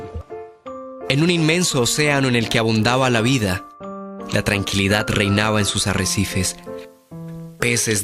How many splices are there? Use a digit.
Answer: 0